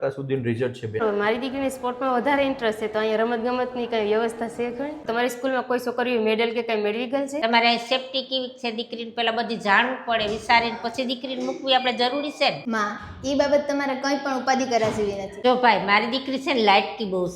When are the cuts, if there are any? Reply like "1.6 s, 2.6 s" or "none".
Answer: 1.0 s, 5.0 s, 7.4 s, 15.3 s